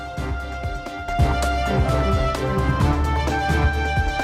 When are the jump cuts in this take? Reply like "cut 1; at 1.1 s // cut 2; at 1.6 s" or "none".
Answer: cut 1; at 1.0 s